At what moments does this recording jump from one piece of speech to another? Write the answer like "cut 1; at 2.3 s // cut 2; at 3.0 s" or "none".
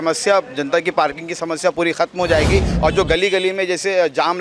cut 1; at 2.7 s